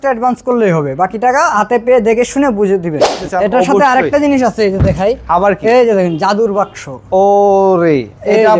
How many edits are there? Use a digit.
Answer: 1